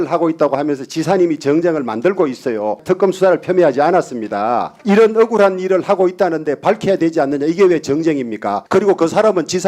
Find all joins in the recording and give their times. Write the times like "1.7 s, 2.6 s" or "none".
2.8 s, 4.7 s, 8.6 s